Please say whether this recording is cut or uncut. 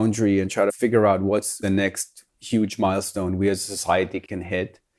cut